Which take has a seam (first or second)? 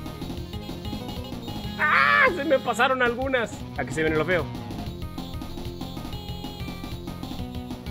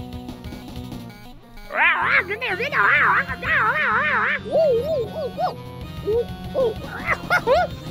first